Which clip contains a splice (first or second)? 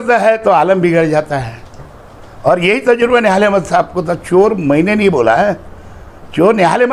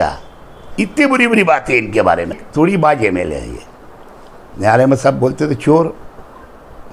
second